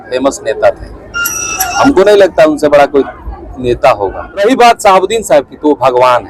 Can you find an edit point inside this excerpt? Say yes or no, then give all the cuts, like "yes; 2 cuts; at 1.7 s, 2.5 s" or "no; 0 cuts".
yes; 1 cut; at 4.4 s